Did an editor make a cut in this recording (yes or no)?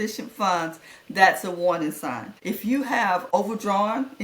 yes